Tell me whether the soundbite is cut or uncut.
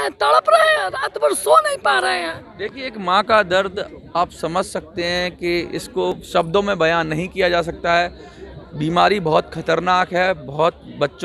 uncut